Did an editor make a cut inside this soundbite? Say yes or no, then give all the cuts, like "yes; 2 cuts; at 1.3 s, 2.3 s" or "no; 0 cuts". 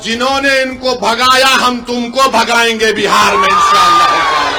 no; 0 cuts